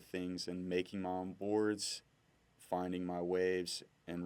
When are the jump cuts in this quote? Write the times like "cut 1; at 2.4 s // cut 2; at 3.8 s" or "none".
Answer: none